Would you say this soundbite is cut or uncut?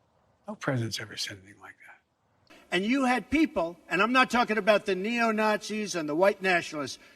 cut